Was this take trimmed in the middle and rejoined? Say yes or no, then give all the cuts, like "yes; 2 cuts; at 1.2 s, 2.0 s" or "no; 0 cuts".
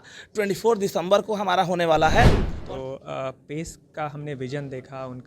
yes; 1 cut; at 2.5 s